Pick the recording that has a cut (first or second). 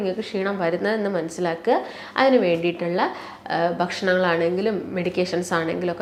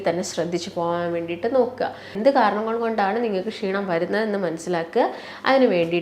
second